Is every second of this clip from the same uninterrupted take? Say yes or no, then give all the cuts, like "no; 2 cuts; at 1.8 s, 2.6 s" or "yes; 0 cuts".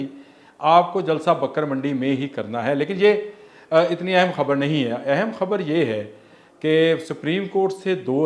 yes; 0 cuts